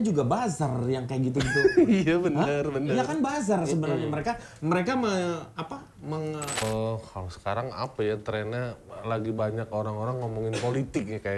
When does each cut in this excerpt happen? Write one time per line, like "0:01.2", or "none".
0:06.6